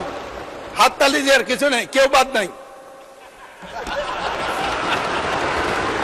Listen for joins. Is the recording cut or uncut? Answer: uncut